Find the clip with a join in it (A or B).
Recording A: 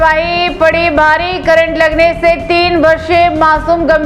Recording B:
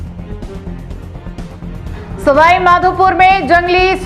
B